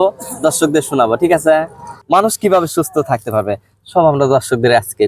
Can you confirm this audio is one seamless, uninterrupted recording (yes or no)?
no